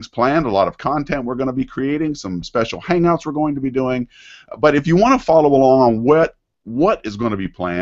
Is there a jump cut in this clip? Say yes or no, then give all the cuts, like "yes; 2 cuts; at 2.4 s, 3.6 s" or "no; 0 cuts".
yes; 1 cut; at 5.4 s